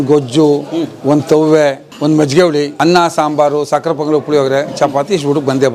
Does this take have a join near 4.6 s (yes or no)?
no